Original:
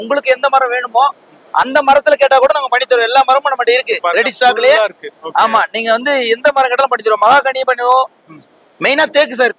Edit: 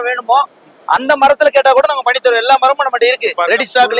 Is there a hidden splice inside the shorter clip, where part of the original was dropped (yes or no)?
no